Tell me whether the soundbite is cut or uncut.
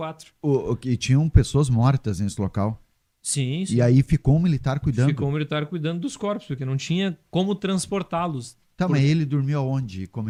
uncut